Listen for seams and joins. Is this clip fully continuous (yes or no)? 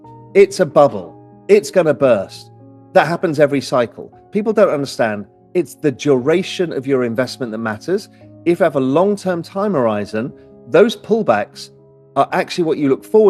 yes